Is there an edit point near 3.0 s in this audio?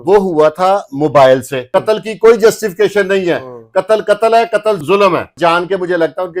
no; 2 cuts; at 1.6 s, 5.4 s

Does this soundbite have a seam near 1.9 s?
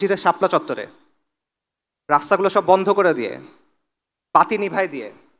no; 0 cuts

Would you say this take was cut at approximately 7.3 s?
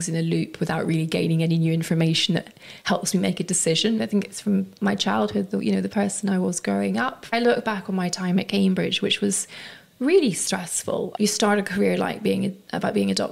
yes; 3 cuts; at 4.0 s, 7.3 s, 11.1 s

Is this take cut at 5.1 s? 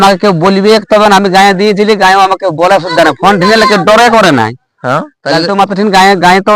yes; 1 cut; at 5.1 s

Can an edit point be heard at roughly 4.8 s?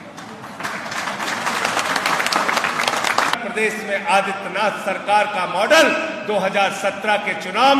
no; 1 cut; at 3.4 s

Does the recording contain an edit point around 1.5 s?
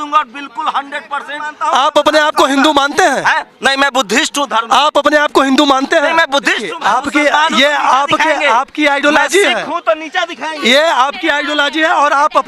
yes; 2 cuts; at 1.5 s, 6.7 s

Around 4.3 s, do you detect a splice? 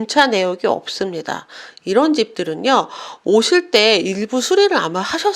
no; 1 cut; at 1.9 s

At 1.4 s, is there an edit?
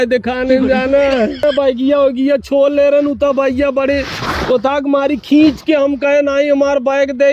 yes; 1 cut; at 1.4 s

